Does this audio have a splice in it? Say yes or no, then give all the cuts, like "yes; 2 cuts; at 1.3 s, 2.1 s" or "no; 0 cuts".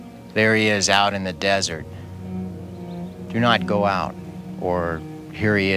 yes; 2 cuts; at 1.8 s, 3.3 s